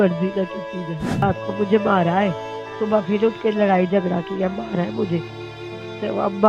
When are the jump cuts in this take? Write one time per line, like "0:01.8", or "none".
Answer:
0:01.2